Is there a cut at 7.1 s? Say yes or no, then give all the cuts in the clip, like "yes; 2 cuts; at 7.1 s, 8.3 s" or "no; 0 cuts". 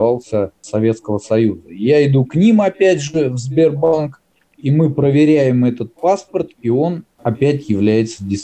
yes; 1 cut; at 7.1 s